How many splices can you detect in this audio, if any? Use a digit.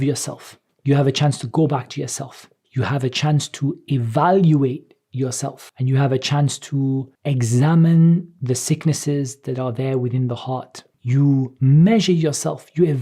1